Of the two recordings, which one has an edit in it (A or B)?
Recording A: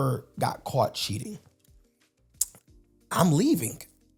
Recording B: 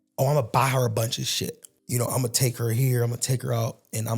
B